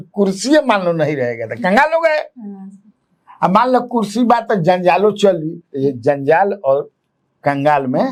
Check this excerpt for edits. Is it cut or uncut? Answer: uncut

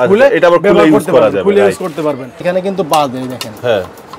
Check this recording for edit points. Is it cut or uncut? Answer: cut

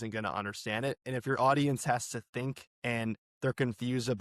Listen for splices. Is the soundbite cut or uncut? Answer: cut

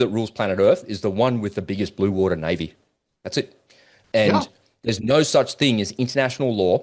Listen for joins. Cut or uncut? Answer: uncut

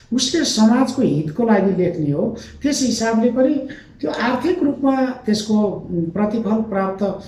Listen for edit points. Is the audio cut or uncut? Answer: uncut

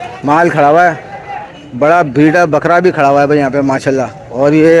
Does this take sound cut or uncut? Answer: uncut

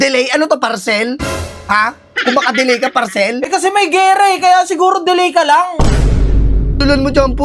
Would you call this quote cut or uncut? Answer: uncut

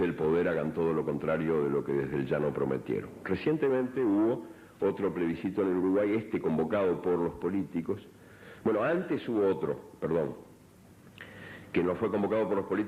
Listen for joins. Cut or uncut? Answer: uncut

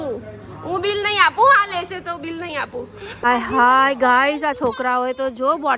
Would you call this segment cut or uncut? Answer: cut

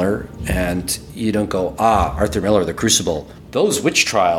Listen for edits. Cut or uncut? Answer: cut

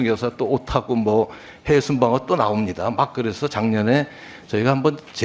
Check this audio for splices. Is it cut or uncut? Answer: uncut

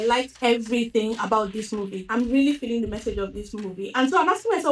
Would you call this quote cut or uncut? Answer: cut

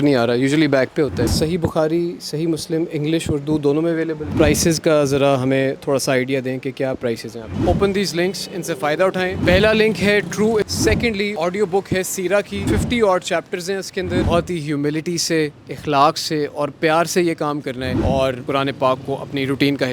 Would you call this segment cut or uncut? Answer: cut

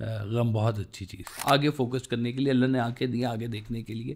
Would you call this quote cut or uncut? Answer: cut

